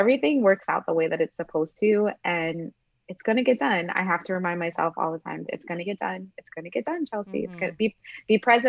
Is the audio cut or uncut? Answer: uncut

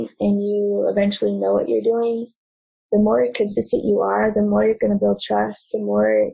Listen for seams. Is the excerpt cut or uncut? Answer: uncut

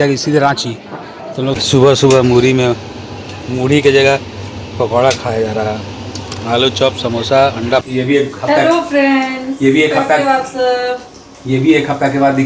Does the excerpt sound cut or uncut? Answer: cut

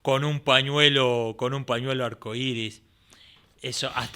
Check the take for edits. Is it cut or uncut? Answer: uncut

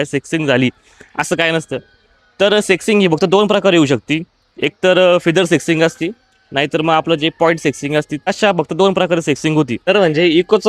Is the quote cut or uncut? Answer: cut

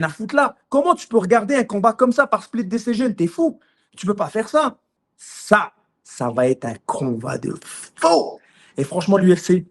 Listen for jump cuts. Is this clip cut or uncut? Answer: cut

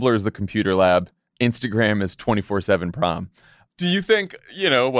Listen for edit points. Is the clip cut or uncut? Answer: cut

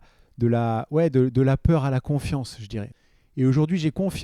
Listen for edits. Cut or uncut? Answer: cut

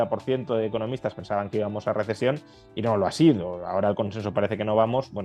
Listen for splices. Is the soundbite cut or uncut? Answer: uncut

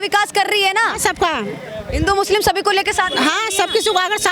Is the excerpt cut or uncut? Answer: uncut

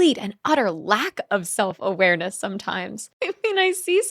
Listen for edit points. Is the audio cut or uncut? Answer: cut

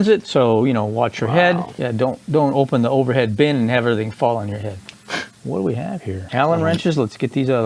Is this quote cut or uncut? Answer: uncut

